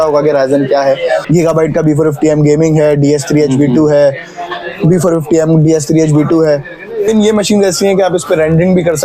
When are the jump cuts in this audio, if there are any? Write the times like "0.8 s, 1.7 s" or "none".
1.2 s, 7.1 s